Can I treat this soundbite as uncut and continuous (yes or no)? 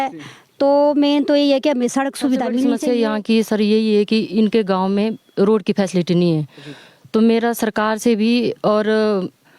no